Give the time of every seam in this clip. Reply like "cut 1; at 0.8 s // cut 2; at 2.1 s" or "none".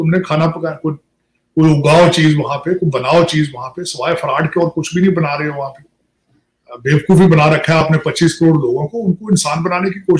none